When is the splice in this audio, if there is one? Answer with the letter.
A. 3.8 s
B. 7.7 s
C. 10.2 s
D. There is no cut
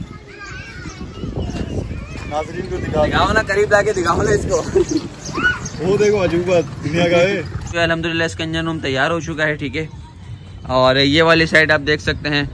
B